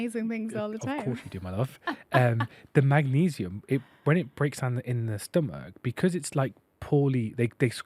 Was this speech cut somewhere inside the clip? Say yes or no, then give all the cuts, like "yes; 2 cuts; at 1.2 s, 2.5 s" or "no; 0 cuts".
no; 0 cuts